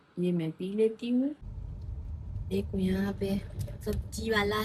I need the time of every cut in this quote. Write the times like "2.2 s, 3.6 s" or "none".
1.4 s

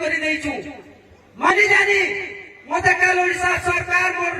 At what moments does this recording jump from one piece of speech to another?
1.5 s

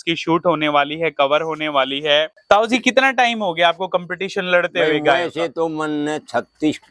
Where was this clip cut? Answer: 2.4 s

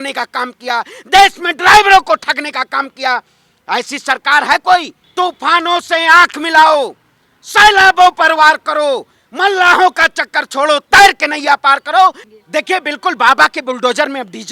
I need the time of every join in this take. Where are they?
5.0 s, 12.3 s

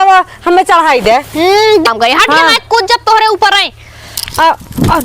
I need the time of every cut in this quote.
1.9 s

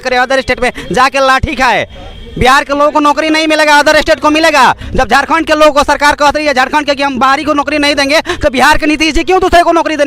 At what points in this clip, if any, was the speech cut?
none

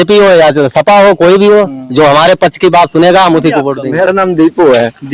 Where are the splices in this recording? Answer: none

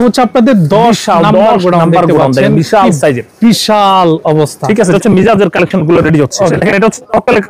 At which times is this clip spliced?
4.9 s, 6.5 s

